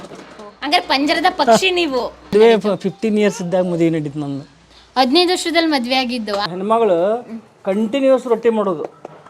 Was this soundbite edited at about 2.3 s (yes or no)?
yes